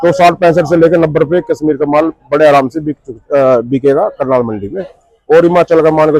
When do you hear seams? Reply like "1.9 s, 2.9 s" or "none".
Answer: none

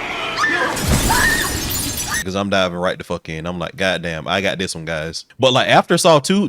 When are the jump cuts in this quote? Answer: 2.2 s, 5.2 s

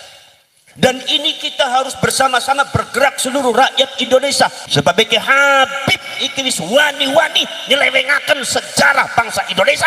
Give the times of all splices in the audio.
4.6 s

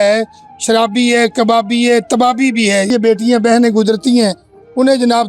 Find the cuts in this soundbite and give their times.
2.9 s

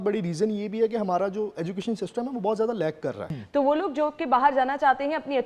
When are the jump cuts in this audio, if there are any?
3.2 s

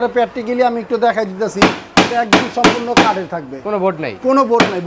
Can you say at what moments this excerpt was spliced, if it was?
none

